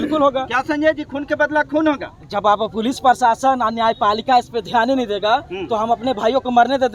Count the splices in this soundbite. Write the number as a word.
zero